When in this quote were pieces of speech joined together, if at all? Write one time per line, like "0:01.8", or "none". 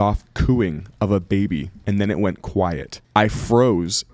0:01.7
0:02.9